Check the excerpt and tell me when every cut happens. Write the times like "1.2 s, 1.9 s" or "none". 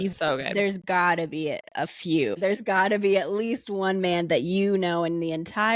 2.4 s